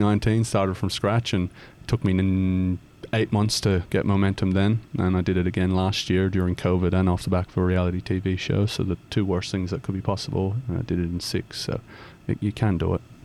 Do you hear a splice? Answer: no; 0 cuts

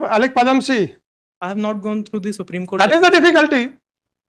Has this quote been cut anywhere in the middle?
no; 0 cuts

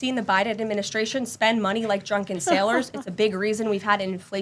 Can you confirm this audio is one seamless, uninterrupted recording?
yes; 0 cuts

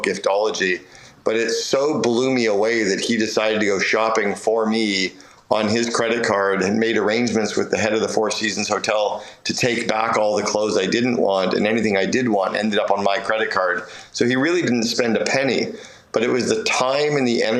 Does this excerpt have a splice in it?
no; 0 cuts

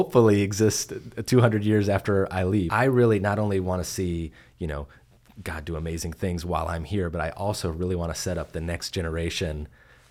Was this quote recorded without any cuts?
no; 1 cut; at 2.7 s

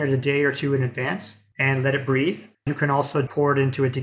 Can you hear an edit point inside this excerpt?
yes; 2 cuts; at 1.5 s, 3.3 s

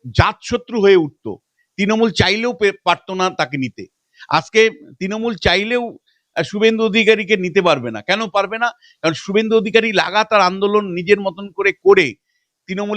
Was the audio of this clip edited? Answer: no; 0 cuts

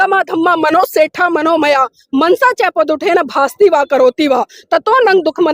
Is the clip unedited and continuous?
yes; 0 cuts

